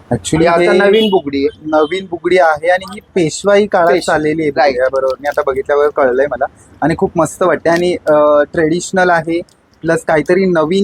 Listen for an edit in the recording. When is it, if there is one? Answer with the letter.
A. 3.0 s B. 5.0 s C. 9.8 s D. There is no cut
D